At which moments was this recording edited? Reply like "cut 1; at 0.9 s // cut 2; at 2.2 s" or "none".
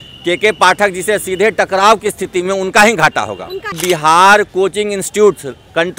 cut 1; at 3.7 s